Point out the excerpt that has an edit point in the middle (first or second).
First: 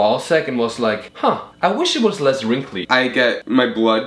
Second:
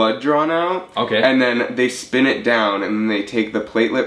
first